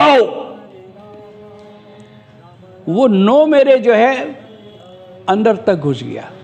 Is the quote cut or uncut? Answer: uncut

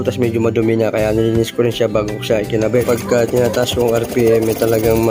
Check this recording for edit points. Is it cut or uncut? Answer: cut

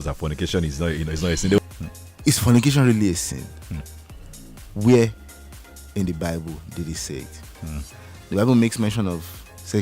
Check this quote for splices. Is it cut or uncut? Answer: cut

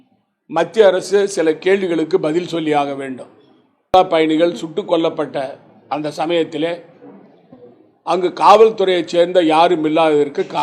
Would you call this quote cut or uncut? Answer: cut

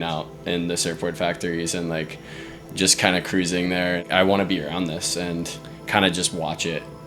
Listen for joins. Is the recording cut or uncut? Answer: cut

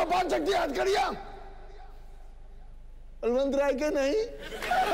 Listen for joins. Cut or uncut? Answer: uncut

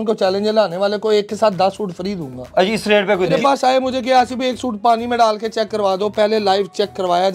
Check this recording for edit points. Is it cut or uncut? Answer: cut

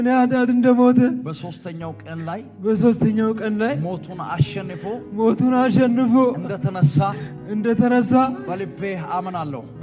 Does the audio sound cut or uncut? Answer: uncut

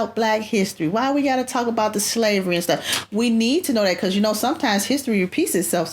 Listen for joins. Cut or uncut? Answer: uncut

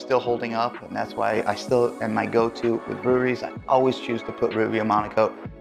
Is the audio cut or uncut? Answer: uncut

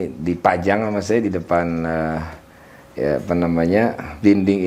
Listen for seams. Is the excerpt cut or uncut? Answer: uncut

